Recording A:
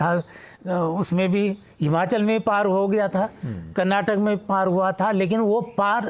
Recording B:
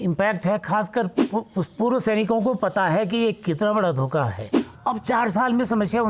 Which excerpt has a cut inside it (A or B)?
B